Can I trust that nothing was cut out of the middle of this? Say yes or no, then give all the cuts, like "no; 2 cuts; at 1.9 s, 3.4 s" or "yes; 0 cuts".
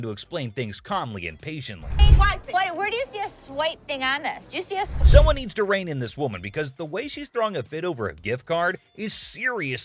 yes; 0 cuts